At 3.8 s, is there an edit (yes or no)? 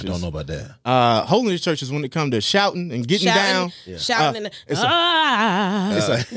no